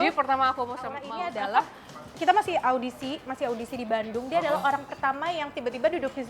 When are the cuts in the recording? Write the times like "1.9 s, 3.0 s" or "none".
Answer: 1.1 s